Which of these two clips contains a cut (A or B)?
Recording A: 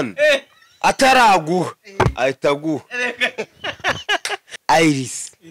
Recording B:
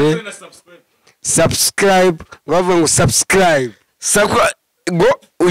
A